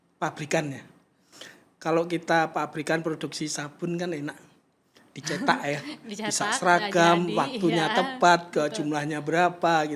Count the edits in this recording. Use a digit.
0